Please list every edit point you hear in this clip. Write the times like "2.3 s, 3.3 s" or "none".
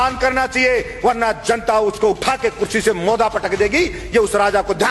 none